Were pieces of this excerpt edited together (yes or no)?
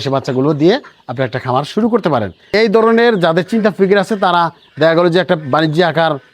yes